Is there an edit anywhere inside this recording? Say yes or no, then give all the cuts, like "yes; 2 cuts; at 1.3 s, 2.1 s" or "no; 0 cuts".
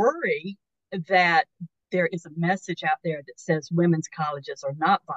no; 0 cuts